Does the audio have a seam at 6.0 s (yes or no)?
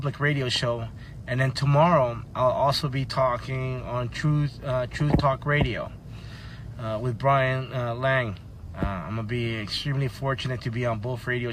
yes